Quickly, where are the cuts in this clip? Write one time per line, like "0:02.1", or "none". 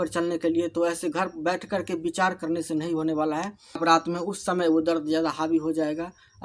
0:03.8